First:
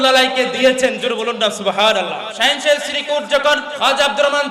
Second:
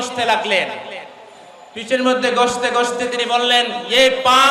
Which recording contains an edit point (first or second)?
first